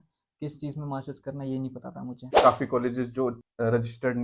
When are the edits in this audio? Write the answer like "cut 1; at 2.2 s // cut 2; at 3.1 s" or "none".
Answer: cut 1; at 2.3 s